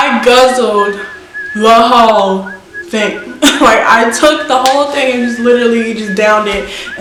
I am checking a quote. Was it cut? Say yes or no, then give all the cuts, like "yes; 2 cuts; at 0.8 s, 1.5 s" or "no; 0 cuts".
no; 0 cuts